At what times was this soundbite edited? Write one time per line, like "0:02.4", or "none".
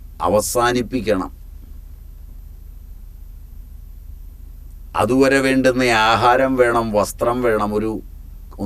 none